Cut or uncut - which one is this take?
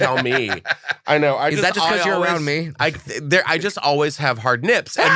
uncut